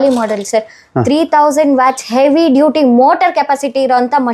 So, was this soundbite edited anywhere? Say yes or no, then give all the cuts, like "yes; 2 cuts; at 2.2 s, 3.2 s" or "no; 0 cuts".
no; 0 cuts